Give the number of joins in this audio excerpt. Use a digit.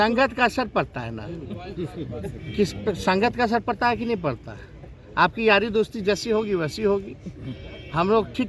0